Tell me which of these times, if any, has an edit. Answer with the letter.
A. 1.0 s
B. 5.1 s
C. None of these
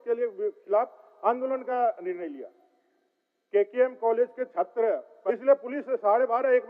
B